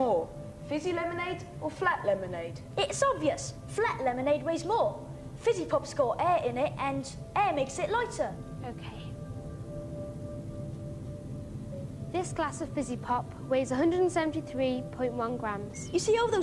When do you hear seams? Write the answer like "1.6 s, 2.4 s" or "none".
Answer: 11.2 s